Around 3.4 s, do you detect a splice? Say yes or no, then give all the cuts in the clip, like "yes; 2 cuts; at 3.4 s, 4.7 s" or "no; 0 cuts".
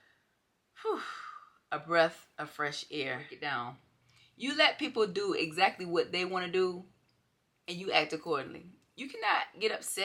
yes; 1 cut; at 3.4 s